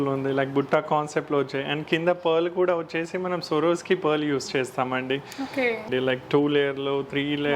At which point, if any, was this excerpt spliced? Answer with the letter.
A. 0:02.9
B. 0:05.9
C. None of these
B